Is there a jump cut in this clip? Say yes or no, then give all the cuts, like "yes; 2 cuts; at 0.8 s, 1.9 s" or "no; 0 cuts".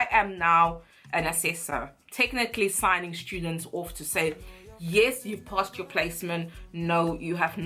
no; 0 cuts